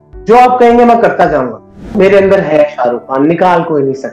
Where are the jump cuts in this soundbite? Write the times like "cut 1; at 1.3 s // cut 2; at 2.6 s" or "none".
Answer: cut 1; at 1.9 s